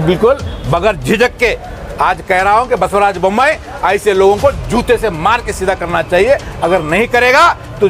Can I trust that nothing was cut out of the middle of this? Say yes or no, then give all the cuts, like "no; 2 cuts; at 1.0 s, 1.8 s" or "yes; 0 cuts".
yes; 0 cuts